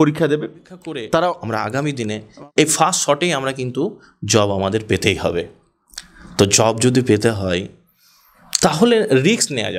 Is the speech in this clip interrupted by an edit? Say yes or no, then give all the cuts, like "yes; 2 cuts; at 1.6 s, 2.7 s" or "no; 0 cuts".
yes; 1 cut; at 1.5 s